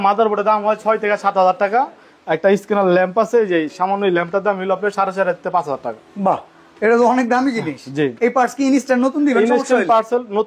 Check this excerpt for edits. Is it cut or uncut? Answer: uncut